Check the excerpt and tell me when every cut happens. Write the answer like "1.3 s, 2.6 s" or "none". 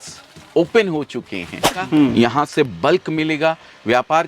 1.9 s